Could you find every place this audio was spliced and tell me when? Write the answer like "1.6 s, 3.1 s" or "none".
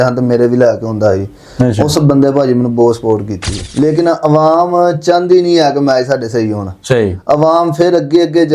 3.6 s